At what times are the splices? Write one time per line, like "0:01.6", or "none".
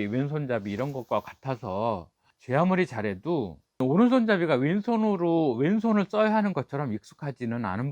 0:03.6